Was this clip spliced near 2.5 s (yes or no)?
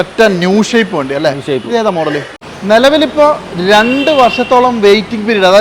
yes